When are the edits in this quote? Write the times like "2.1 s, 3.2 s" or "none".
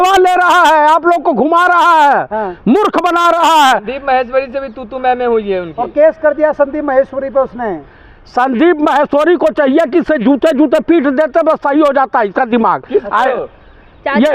none